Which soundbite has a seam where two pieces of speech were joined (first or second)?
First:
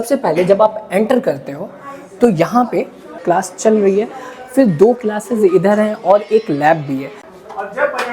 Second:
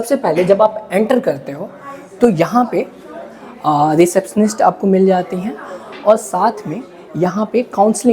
first